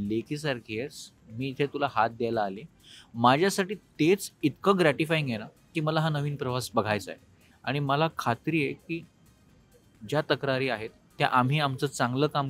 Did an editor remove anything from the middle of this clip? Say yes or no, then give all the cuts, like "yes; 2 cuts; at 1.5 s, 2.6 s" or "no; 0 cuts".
no; 0 cuts